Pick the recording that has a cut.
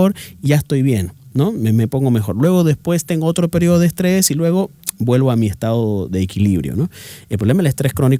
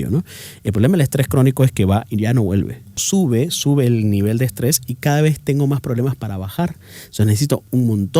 second; 1 cut; at 3.0 s

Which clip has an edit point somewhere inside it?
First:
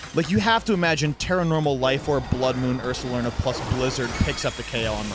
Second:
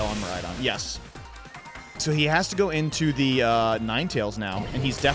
second; 1 cut; at 2.0 s

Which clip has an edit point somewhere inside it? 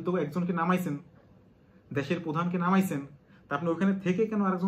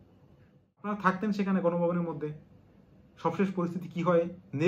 second; 1 cut; at 0.9 s

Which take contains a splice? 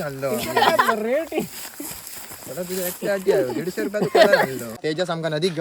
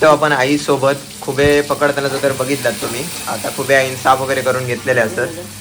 first; 1 cut; at 4.7 s

